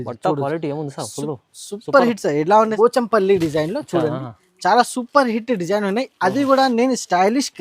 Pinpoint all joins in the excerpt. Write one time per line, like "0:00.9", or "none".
0:02.7